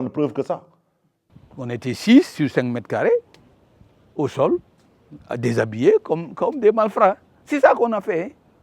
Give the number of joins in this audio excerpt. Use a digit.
1